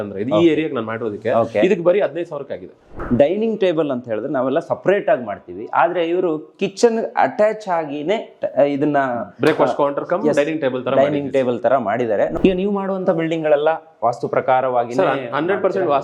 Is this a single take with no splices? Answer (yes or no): no